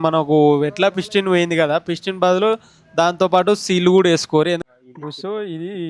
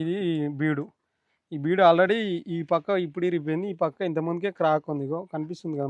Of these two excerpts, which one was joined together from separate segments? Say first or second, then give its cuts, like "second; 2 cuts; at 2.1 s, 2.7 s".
first; 1 cut; at 4.6 s